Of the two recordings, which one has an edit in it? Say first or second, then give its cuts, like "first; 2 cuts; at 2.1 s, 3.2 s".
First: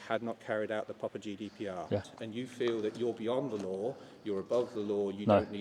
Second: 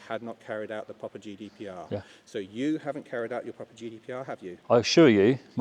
first; 1 cut; at 2.2 s